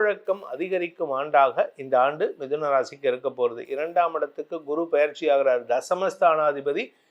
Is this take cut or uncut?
uncut